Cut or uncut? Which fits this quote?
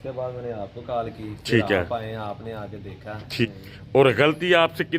cut